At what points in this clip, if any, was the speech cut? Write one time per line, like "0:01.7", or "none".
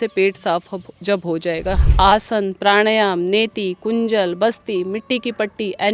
0:01.8